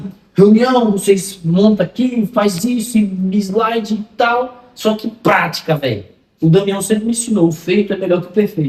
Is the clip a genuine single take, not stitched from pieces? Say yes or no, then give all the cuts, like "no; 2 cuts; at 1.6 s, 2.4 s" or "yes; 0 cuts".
yes; 0 cuts